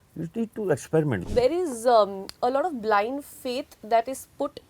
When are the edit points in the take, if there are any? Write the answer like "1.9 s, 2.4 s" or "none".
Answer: 1.2 s

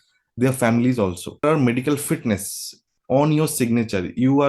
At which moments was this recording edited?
1.4 s

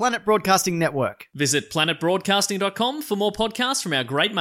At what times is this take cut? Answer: none

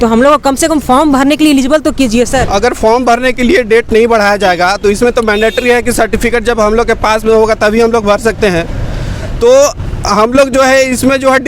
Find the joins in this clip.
2.5 s

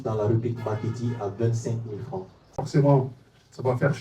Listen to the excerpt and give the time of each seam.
2.5 s

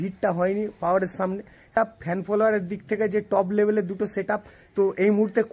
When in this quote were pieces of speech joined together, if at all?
1.8 s

